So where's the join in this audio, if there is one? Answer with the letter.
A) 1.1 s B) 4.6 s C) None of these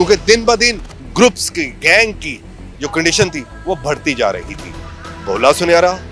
B